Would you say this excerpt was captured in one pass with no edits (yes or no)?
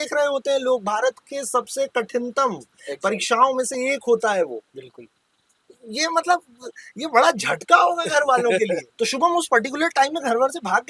no